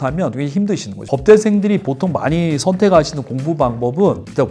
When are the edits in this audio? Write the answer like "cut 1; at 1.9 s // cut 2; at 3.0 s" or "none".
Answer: cut 1; at 1.1 s